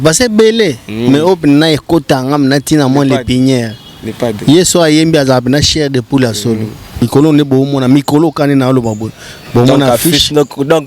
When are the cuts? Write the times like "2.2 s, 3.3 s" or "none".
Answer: 7.0 s